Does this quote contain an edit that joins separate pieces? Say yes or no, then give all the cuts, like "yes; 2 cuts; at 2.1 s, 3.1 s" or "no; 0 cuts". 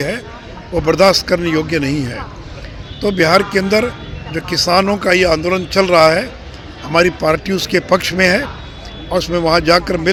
no; 0 cuts